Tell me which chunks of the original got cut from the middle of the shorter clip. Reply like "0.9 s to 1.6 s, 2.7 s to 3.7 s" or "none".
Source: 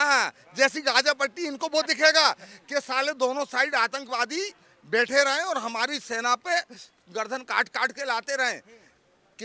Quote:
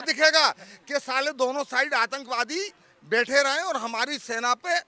none